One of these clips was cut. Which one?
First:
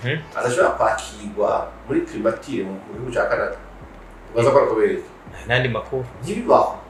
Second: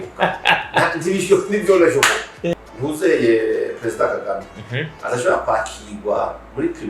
second; 1 cut; at 2.5 s

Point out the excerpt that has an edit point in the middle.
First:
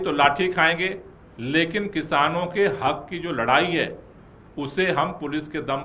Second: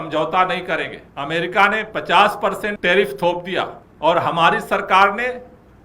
second; 3 cuts; at 1.0 s, 2.8 s, 3.8 s

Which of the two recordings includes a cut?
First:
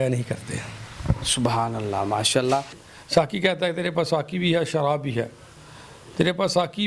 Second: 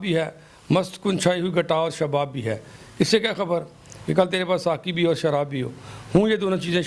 first; 1 cut; at 2.8 s

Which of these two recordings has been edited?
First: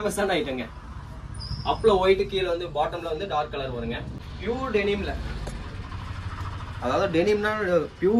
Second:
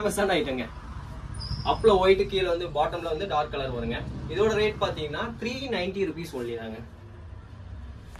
first; 1 cut; at 4.1 s

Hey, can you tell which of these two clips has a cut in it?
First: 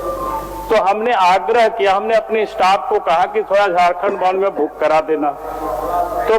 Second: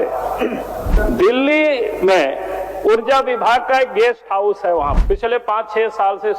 second; 2 cuts; at 0.9 s, 5.0 s

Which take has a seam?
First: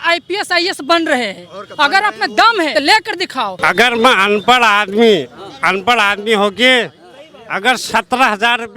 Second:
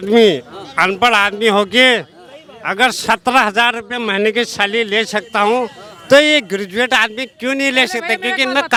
first; 2 cuts; at 2.7 s, 3.6 s

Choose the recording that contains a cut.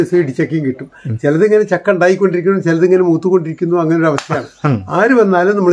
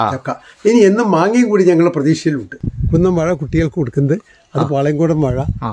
second; 1 cut; at 2.5 s

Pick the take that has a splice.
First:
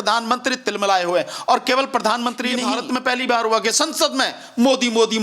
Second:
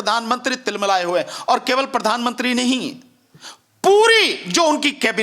first; 1 cut; at 2.7 s

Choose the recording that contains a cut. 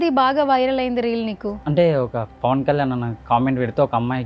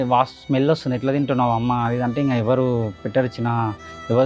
first; 1 cut; at 1.6 s

